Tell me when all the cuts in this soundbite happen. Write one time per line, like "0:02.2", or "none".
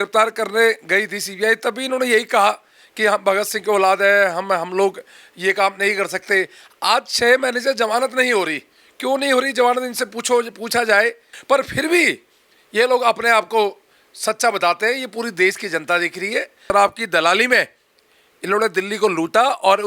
0:11.3
0:16.7